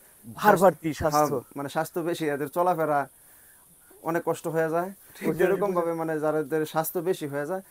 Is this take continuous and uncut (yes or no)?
yes